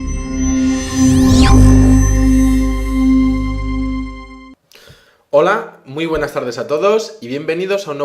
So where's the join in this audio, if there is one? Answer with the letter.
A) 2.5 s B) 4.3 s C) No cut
B